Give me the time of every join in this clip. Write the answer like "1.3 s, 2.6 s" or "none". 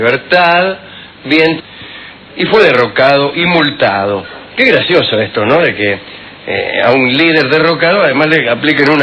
none